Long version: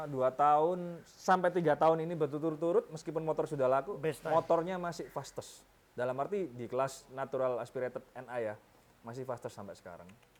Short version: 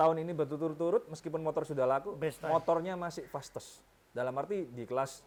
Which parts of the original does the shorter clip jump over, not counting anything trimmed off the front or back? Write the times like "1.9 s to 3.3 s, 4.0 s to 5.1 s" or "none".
none